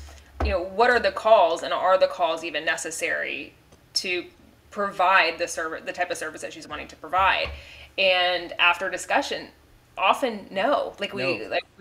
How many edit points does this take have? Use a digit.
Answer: 0